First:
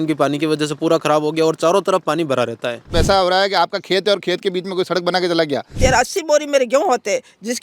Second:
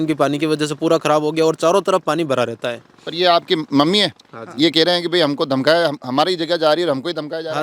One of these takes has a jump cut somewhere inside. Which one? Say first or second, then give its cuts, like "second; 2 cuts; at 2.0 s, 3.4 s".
first; 2 cuts; at 2.9 s, 5.8 s